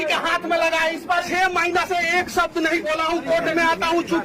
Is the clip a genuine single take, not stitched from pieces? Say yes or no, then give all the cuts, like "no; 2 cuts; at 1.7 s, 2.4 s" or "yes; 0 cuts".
no; 1 cut; at 1.3 s